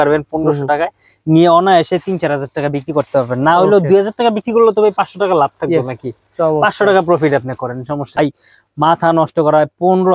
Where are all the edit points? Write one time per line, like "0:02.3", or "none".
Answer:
0:08.2